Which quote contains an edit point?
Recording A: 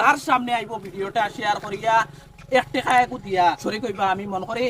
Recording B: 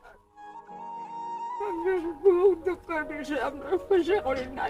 A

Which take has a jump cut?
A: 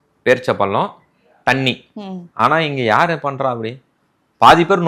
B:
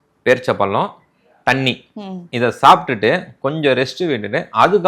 A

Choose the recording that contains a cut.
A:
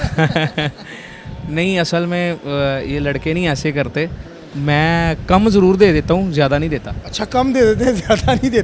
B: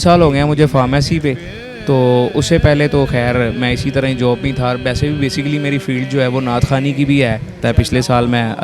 B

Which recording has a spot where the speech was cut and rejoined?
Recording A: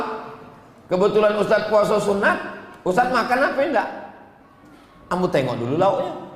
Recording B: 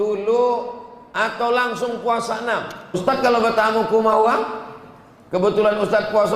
B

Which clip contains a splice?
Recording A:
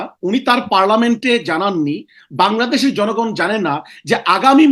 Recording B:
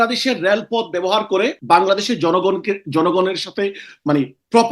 B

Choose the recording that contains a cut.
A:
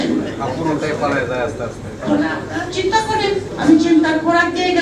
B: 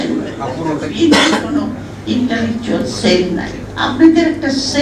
B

